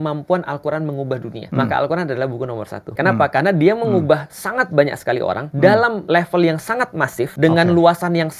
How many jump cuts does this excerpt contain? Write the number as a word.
five